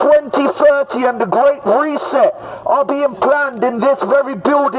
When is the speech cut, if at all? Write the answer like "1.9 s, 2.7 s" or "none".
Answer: none